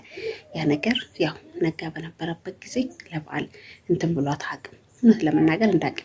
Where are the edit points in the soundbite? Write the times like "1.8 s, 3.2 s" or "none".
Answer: none